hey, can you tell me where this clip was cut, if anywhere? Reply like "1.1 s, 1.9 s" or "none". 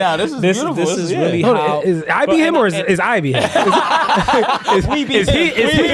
none